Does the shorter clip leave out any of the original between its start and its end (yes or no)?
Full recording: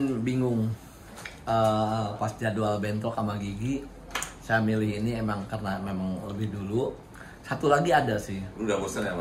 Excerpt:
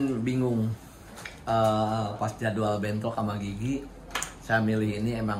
no